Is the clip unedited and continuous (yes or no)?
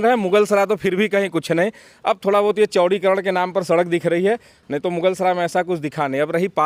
yes